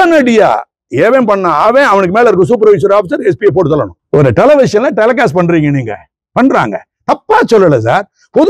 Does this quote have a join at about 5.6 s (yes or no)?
no